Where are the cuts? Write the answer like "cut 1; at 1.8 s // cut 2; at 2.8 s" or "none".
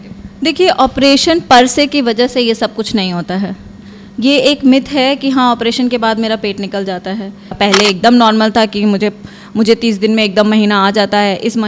cut 1; at 7.5 s